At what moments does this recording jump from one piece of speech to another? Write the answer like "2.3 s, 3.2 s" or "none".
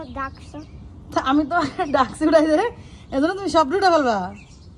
none